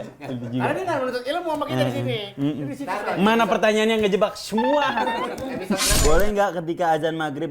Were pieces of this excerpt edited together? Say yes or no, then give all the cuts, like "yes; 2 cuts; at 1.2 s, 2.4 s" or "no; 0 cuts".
yes; 1 cut; at 6.0 s